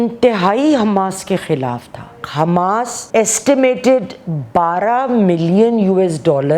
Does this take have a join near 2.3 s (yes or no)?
yes